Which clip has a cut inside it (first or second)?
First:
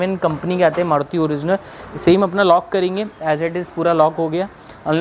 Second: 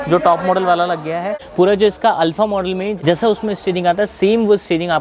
second